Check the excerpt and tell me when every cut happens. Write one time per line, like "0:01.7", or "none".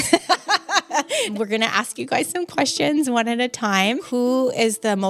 0:01.4
0:04.0